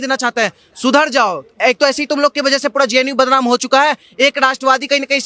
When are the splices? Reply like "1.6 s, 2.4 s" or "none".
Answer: none